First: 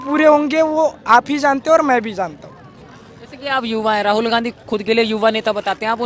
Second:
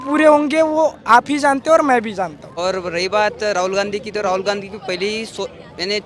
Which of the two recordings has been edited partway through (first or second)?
second